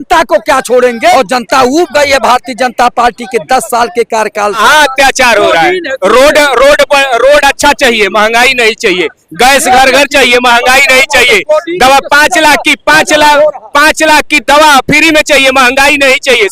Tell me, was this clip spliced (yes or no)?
yes